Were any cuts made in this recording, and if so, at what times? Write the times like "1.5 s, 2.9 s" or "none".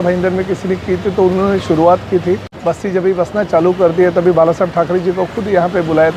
2.5 s